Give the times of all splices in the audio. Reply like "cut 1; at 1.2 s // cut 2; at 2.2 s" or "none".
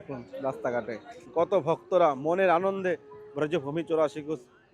cut 1; at 1.3 s